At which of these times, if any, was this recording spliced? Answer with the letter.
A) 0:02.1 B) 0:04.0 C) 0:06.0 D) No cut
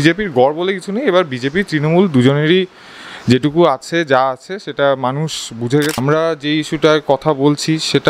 C